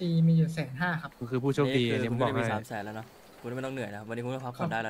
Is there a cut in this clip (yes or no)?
yes